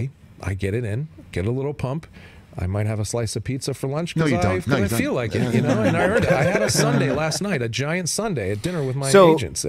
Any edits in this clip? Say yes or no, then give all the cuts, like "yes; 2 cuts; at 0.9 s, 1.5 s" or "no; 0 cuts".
no; 0 cuts